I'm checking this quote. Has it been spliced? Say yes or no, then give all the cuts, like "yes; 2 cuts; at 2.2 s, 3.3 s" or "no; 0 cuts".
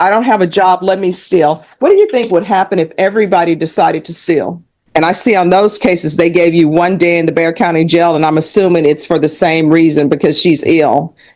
yes; 1 cut; at 4.8 s